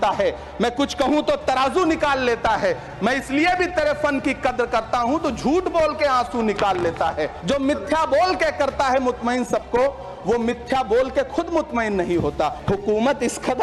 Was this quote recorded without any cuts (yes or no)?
no